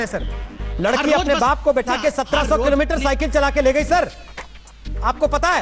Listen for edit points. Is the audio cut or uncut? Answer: uncut